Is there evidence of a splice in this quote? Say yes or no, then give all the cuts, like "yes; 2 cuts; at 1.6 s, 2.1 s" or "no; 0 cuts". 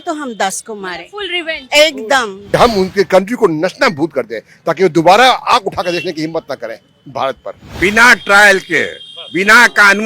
yes; 2 cuts; at 2.4 s, 7.7 s